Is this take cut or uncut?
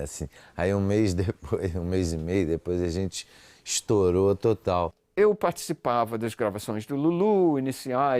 cut